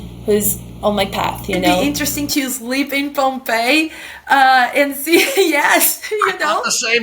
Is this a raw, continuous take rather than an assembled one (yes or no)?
no